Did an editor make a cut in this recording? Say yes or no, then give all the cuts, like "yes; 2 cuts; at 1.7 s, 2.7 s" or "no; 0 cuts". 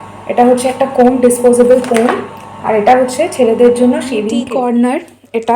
yes; 1 cut; at 4.4 s